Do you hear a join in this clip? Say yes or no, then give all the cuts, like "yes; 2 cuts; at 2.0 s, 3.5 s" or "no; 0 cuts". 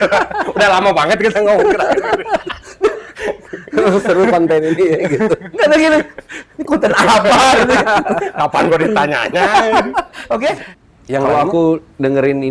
yes; 1 cut; at 10.7 s